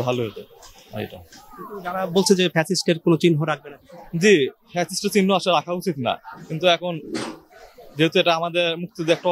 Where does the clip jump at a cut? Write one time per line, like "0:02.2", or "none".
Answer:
none